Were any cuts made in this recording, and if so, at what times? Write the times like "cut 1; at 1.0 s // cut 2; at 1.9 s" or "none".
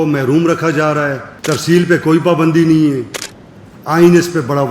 cut 1; at 1.3 s